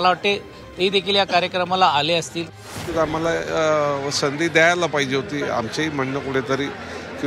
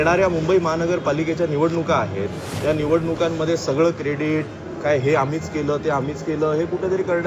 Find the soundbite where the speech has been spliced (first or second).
first